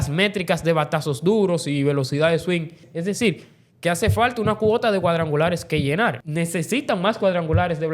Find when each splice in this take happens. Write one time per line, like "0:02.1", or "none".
0:02.8
0:06.2